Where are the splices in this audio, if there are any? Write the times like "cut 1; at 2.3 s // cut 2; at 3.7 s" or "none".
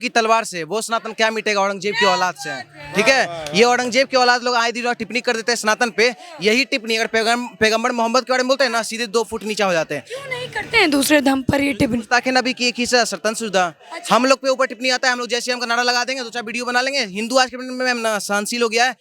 none